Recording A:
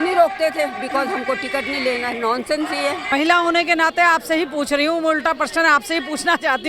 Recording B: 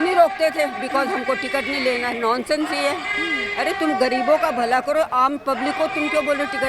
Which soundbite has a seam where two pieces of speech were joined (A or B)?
A